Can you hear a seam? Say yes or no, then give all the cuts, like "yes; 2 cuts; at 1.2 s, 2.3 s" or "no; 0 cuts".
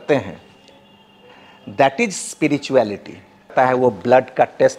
yes; 1 cut; at 3.5 s